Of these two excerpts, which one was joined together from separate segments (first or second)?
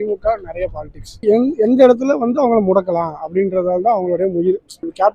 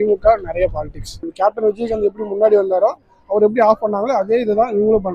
second